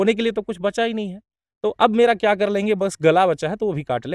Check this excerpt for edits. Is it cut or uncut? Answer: uncut